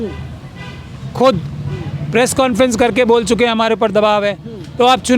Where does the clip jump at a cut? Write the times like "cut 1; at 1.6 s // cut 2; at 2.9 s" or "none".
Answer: none